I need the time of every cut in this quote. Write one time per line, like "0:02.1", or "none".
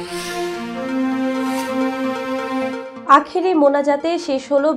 0:02.9